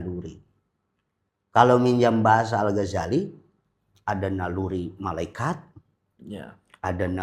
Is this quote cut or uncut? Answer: uncut